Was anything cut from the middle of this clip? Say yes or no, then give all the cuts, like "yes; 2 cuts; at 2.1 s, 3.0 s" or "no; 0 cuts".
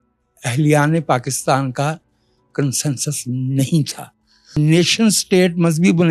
yes; 1 cut; at 4.4 s